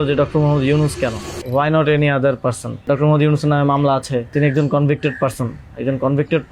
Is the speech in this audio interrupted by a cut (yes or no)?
yes